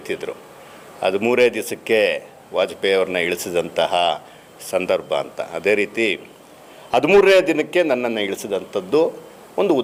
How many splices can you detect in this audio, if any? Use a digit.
0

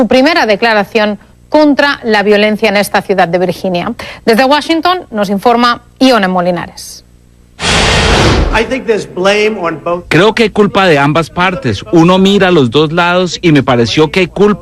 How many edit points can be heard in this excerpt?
0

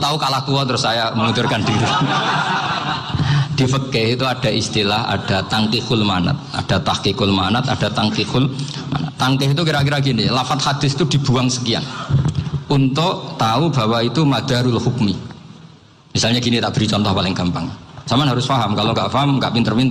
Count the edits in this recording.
0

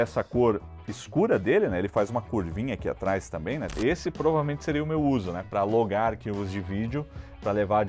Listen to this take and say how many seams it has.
1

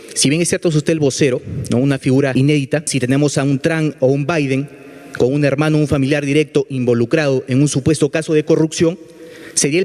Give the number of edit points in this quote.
1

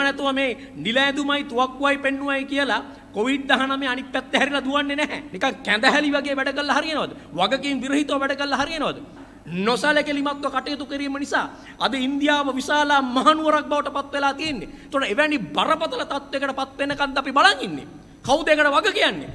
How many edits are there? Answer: 2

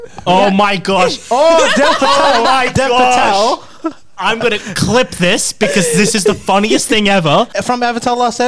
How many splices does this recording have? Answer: 1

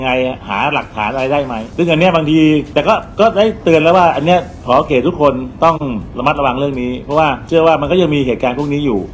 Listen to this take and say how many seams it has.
4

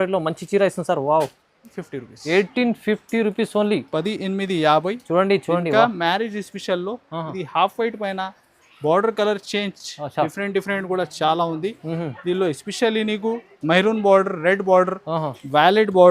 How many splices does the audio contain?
1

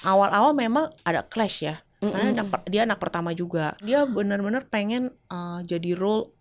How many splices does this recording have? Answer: 2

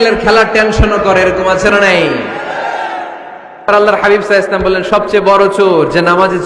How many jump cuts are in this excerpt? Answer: 1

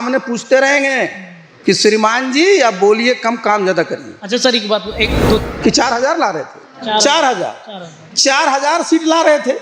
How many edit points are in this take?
1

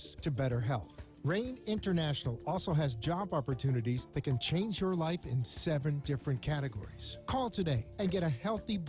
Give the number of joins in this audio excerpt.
0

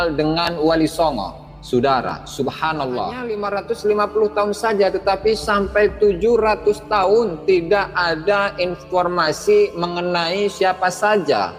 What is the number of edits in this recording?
1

